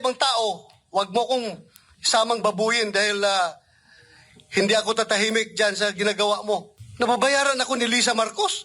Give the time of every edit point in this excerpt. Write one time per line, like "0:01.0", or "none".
0:06.8

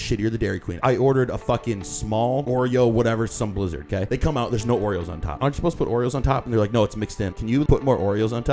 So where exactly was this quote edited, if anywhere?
0:00.8
0:02.4
0:04.1
0:05.4
0:07.6

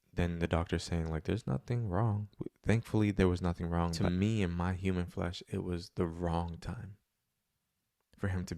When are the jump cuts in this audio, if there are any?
0:04.0

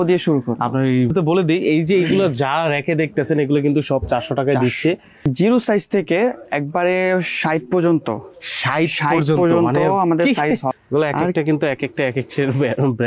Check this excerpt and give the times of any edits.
0:01.1
0:05.3
0:10.7

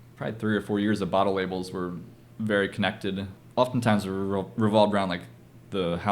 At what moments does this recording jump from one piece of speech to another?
0:03.3

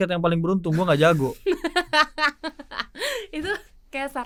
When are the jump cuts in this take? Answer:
none

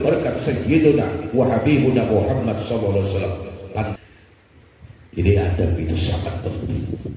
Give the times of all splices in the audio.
0:04.0

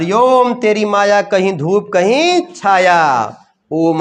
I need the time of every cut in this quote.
none

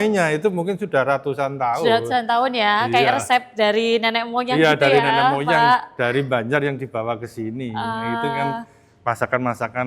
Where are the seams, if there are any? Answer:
none

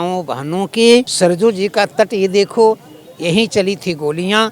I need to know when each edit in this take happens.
0:01.1

